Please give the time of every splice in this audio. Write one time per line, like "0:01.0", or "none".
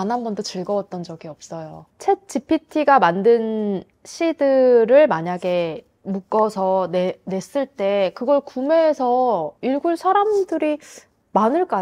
0:01.9